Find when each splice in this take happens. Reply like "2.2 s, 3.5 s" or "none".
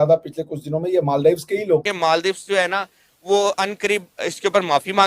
1.9 s